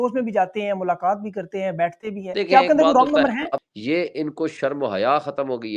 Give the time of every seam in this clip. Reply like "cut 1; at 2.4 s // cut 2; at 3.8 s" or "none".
cut 1; at 2.2 s // cut 2; at 3.7 s

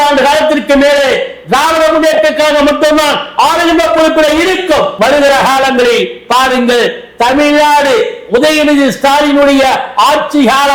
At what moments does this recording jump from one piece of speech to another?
cut 1; at 4.9 s

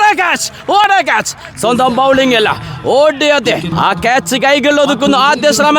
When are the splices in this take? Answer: cut 1; at 3.7 s

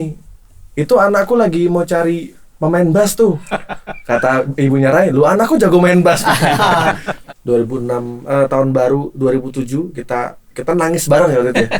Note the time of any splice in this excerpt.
cut 1; at 7.1 s

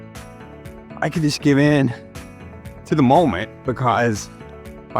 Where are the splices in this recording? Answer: cut 1; at 1.0 s

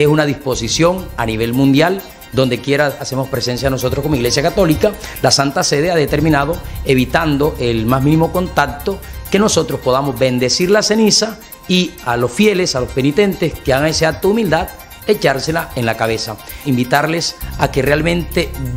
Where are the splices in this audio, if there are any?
cut 1; at 16.6 s

